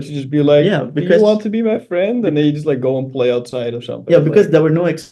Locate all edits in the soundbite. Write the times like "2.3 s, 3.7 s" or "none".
none